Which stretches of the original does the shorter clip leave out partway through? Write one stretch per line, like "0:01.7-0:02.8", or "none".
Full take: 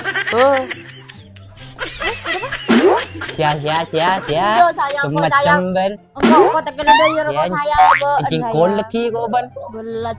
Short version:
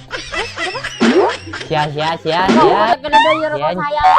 0:04.1-0:06.2